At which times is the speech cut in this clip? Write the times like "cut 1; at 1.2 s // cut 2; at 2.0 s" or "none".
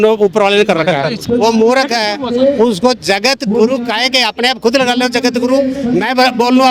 cut 1; at 1.2 s